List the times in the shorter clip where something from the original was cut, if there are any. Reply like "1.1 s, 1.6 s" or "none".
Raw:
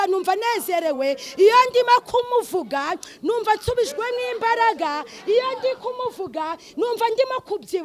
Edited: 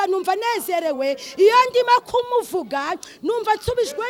none